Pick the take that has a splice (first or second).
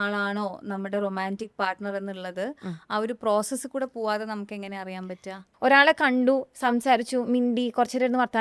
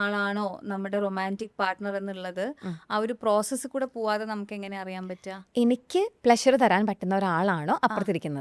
first